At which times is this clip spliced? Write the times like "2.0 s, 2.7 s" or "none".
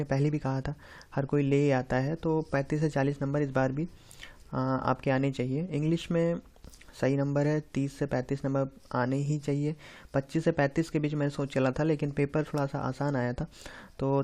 1.5 s

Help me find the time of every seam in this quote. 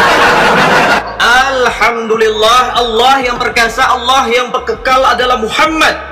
1.0 s

